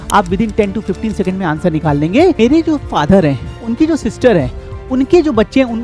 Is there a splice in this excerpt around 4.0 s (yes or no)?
no